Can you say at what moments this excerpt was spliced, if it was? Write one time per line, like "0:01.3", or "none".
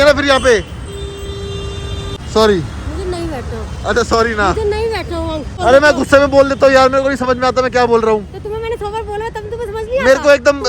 0:02.2
0:05.5